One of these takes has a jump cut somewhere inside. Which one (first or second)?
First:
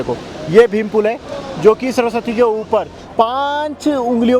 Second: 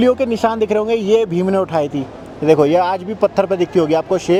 first